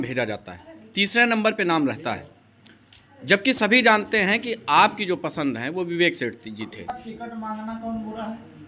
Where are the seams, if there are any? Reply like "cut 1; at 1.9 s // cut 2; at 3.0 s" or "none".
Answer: cut 1; at 7.0 s